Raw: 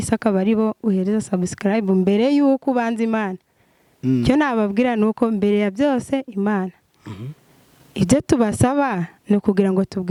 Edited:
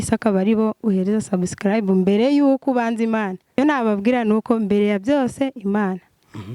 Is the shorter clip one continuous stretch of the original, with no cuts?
no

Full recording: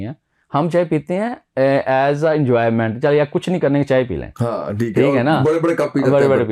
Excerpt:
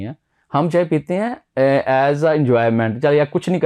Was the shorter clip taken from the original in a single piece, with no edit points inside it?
yes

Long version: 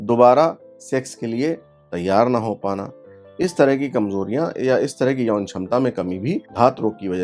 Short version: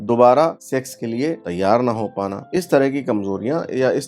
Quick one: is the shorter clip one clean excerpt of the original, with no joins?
no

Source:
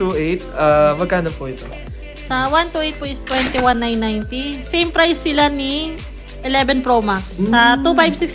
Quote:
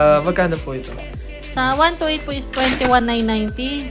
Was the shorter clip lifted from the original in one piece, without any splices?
yes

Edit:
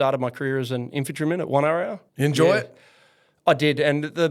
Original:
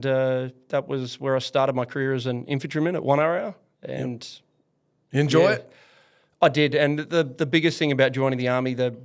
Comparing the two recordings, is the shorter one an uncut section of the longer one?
no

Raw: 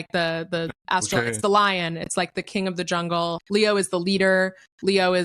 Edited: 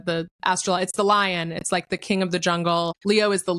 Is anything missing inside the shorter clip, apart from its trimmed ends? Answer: no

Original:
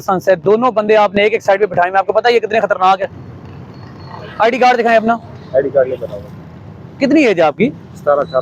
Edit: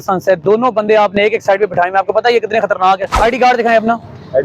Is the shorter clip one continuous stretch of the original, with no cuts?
no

